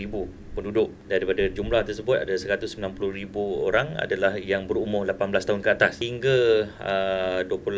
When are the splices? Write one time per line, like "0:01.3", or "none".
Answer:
0:01.0
0:06.0

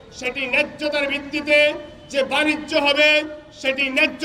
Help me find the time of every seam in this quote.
none

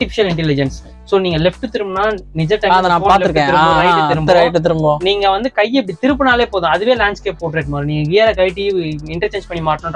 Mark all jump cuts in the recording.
none

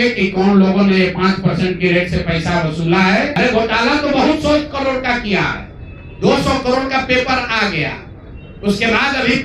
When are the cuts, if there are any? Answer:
0:03.3

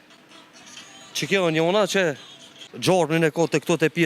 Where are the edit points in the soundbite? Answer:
0:02.7

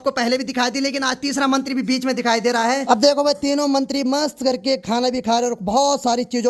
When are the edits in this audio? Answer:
0:02.8

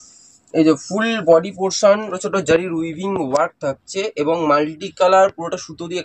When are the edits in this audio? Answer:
0:02.1

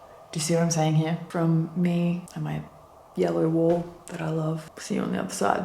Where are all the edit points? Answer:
0:01.2
0:02.7
0:04.7

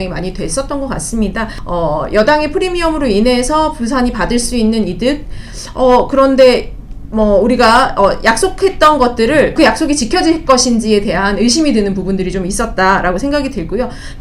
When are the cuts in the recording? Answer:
0:01.5
0:09.5

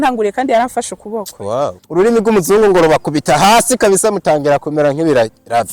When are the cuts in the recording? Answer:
0:01.8

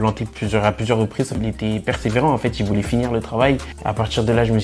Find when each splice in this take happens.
0:01.3
0:03.7

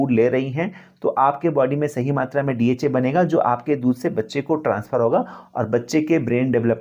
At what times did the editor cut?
none

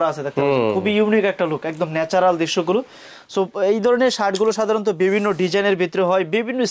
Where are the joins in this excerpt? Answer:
none

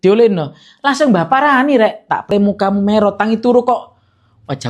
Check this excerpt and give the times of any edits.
0:02.3

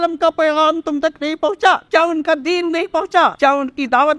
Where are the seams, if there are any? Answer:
0:01.8
0:03.4

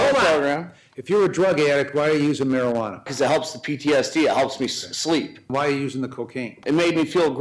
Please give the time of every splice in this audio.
0:03.1
0:05.5
0:06.5

